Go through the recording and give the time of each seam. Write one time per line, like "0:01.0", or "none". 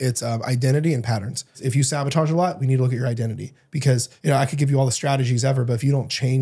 0:01.6
0:04.1